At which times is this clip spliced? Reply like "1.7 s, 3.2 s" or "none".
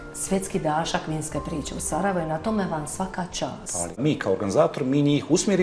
4.0 s